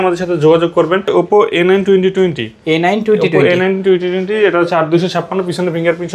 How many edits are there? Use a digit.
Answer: 1